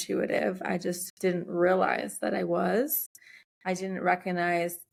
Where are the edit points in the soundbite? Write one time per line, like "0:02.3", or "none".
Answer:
none